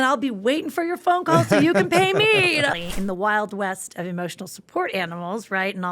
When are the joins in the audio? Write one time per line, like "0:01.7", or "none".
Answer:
0:02.8